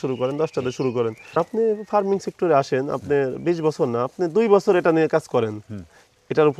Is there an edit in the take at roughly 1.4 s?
yes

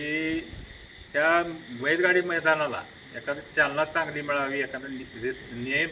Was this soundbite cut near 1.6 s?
no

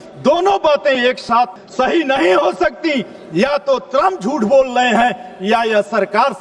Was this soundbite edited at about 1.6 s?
yes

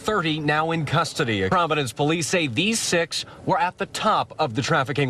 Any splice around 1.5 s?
yes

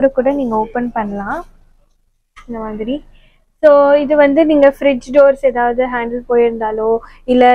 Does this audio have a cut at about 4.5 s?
no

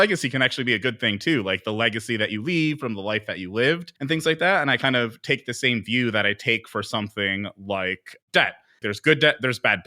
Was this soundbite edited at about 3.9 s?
yes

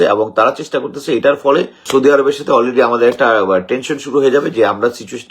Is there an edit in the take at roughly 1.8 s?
yes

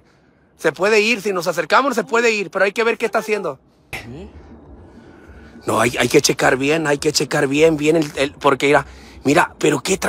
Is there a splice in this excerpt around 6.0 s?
no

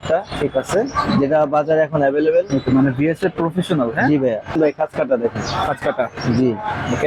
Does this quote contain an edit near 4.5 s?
yes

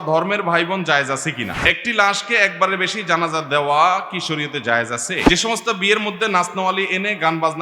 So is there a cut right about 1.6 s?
yes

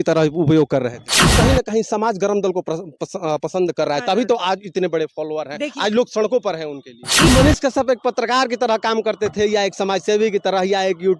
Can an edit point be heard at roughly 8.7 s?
no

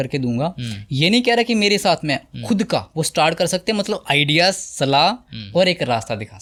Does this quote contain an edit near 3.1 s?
no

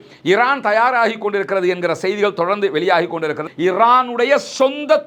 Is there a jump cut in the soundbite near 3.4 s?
yes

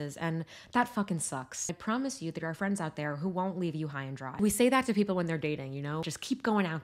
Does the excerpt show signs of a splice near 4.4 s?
yes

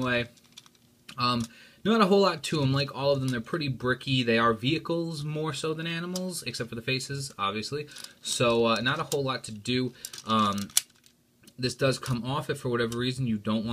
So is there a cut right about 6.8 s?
yes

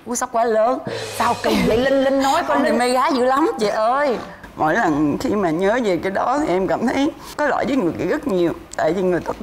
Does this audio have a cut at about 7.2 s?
no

